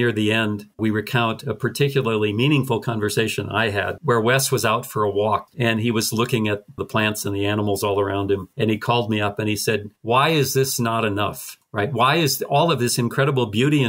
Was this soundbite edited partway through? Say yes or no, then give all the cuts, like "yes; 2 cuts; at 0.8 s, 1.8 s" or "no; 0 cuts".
yes; 1 cut; at 5.5 s